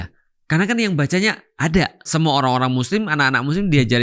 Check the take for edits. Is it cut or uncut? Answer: cut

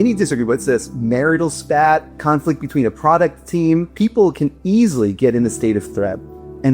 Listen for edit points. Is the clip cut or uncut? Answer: cut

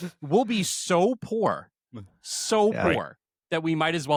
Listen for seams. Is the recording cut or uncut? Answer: uncut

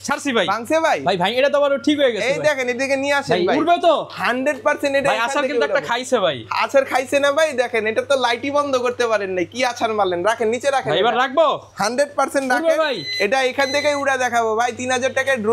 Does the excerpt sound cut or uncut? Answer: uncut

